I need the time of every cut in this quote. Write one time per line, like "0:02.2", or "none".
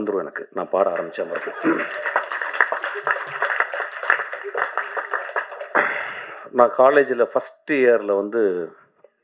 none